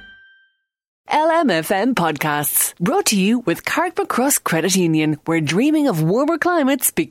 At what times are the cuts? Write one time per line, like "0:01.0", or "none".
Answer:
0:01.0